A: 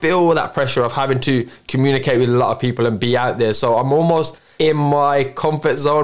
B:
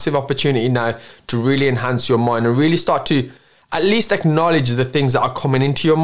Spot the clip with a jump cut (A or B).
A